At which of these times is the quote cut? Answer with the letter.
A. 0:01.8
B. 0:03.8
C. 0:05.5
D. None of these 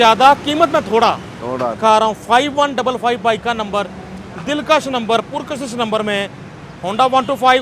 A